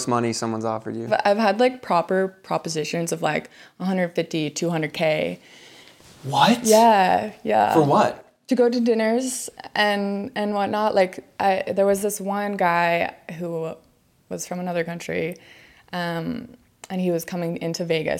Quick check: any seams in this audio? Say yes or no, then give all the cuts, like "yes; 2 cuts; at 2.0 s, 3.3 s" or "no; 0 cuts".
yes; 1 cut; at 1.0 s